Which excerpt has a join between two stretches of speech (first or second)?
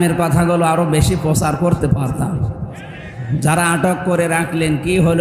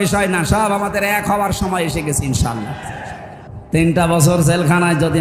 second